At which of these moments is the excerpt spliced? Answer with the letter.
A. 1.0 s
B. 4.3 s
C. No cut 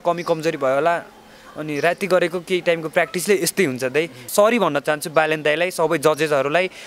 B